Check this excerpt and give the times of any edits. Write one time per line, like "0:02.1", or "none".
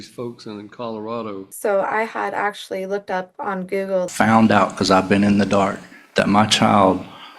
0:01.5
0:04.1